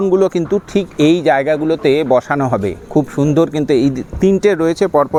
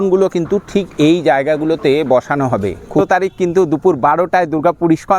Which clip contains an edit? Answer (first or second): second